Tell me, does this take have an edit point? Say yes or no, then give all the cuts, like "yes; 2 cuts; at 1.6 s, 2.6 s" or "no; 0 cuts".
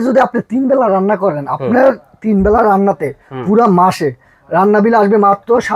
no; 0 cuts